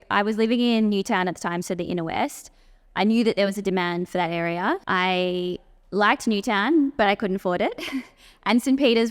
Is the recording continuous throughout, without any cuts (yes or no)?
no